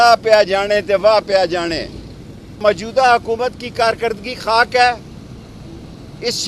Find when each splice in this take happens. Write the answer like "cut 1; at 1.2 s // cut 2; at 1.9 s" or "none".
cut 1; at 2.6 s

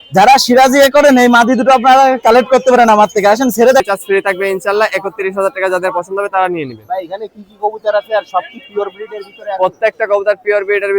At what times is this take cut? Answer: cut 1; at 3.8 s

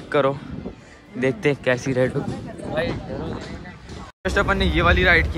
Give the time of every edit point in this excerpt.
cut 1; at 4.3 s

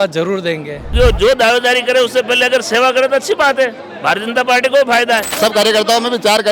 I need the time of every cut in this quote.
cut 1; at 0.9 s // cut 2; at 5.3 s

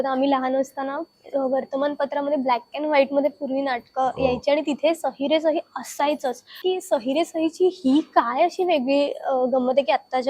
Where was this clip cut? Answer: cut 1; at 6.6 s

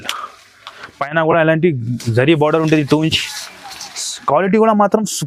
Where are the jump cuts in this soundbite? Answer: none

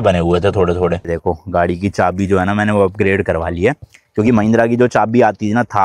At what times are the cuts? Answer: cut 1; at 1.1 s

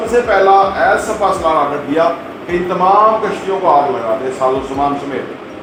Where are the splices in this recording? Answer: none

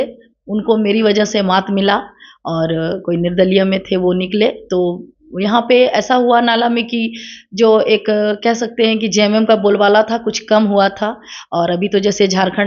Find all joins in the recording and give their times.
none

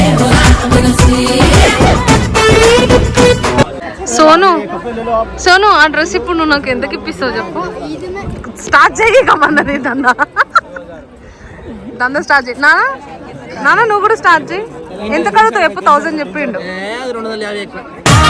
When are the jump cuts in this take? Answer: cut 1; at 3.8 s

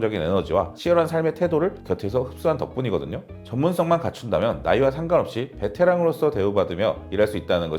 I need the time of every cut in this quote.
cut 1; at 3.3 s

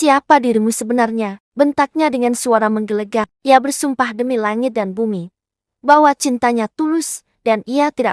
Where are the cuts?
cut 1; at 3.3 s

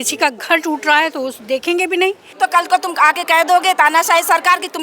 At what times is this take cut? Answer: cut 1; at 2.2 s

